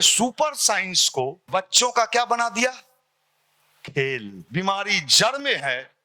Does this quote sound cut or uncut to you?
cut